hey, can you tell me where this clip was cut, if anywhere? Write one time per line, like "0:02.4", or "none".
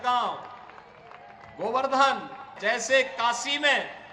0:02.5